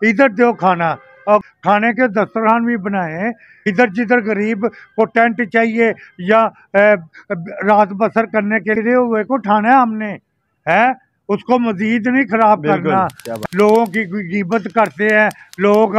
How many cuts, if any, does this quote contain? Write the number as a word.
four